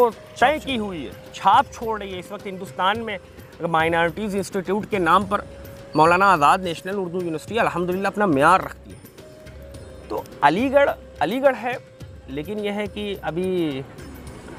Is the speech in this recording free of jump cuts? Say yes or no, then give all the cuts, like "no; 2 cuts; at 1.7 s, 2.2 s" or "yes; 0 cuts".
yes; 0 cuts